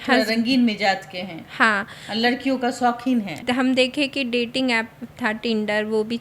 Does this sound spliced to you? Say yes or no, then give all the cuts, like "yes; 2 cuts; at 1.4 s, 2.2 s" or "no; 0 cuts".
yes; 1 cut; at 3.4 s